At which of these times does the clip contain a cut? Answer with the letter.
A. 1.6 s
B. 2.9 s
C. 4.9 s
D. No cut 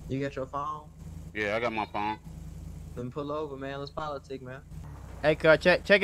C